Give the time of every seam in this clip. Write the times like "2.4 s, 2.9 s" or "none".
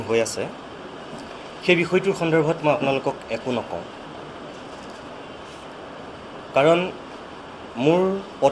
none